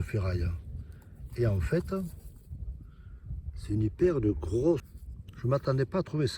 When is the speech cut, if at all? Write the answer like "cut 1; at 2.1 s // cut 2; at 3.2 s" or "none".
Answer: cut 1; at 4.9 s